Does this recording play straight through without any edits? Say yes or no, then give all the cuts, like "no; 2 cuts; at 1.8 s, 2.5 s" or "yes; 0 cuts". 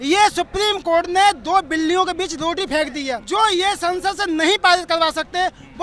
no; 1 cut; at 3.1 s